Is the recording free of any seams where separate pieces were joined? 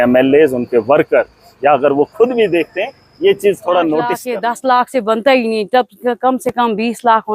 no; 1 cut; at 4.3 s

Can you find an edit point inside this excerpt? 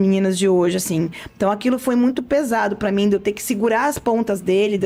no; 0 cuts

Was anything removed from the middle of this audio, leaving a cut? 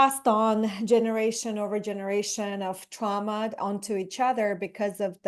no; 0 cuts

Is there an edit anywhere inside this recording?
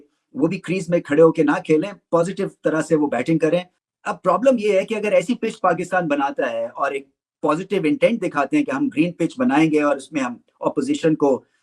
no; 0 cuts

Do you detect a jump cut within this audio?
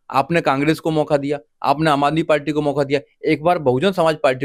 no; 0 cuts

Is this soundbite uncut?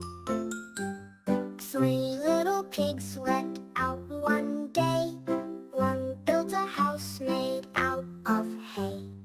no; 1 cut; at 1.6 s

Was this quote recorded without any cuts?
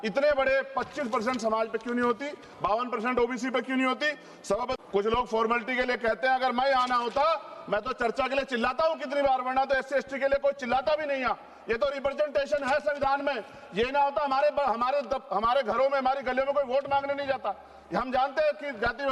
no; 1 cut; at 4.8 s

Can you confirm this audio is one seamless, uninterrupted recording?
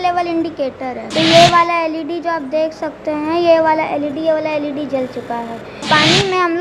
no; 2 cuts; at 1.0 s, 5.9 s

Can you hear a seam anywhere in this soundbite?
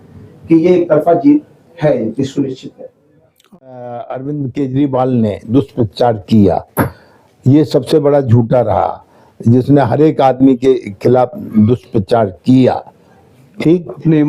yes; 1 cut; at 3.5 s

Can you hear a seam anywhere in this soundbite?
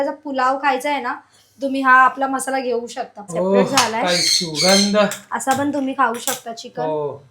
yes; 1 cut; at 3.2 s

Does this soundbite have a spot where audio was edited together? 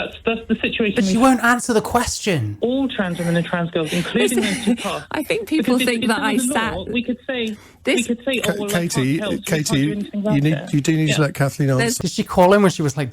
yes; 2 cuts; at 2.5 s, 12.0 s

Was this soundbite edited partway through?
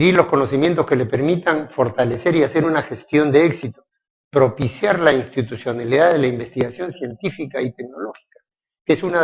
no; 0 cuts

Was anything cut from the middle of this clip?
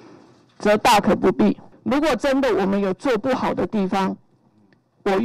yes; 1 cut; at 1.7 s

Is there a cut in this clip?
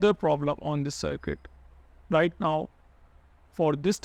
no; 0 cuts

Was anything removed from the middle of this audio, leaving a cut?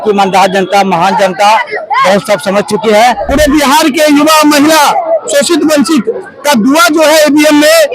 yes; 1 cut; at 3.3 s

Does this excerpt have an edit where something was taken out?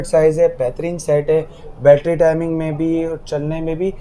no; 0 cuts

